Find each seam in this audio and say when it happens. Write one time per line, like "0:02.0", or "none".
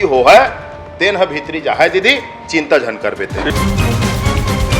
0:03.5

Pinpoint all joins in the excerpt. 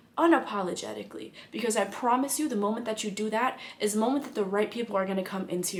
none

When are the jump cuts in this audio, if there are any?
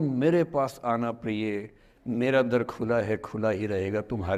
none

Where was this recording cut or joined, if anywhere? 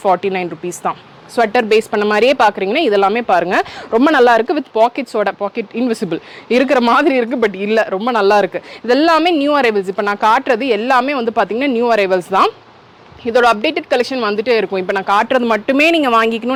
none

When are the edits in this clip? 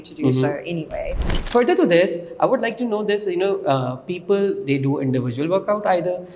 0:01.3

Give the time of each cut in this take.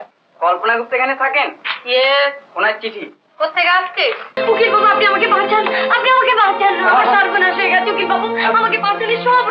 0:04.3

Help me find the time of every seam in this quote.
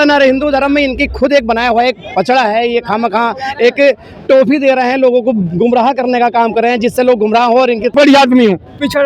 0:07.9

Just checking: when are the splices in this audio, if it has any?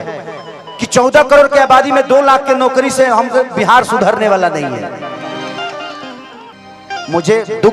0:06.5

